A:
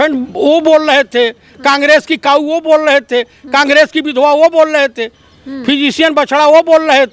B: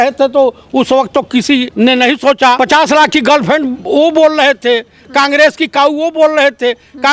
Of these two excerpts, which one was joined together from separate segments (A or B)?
B